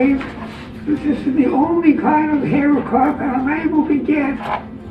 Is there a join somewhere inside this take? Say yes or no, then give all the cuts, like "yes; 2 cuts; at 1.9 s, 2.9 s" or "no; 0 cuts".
no; 0 cuts